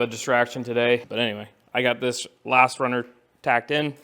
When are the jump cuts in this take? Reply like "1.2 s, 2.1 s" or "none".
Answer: 1.1 s